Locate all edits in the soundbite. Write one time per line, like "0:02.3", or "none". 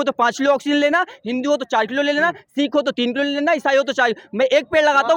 none